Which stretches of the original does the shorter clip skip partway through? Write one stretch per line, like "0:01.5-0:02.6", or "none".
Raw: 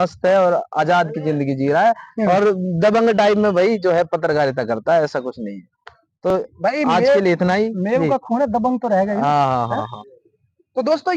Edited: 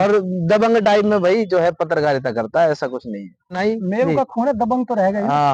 0:05.9-0:07.5